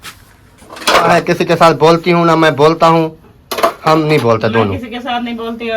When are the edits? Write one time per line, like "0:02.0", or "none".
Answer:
0:01.1